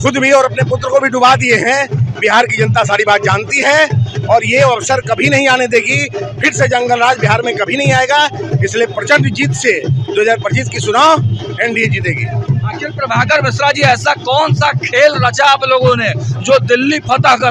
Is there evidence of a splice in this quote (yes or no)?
no